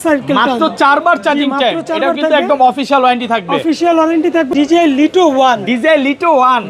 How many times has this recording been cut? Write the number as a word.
one